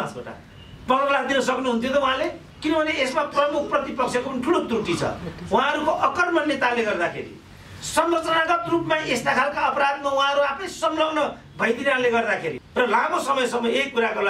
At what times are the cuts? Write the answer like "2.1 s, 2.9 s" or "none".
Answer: 2.5 s, 12.6 s